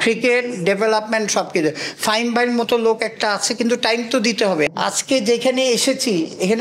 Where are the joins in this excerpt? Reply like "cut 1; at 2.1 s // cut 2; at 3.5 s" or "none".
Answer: cut 1; at 4.7 s